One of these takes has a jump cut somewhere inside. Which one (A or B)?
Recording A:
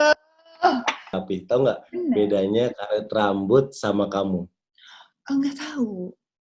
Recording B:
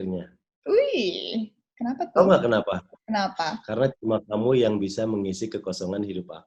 A